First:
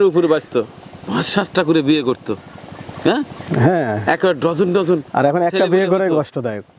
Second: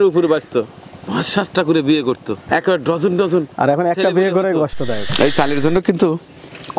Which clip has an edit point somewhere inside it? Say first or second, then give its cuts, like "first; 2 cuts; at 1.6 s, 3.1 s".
second; 2 cuts; at 2.4 s, 5.1 s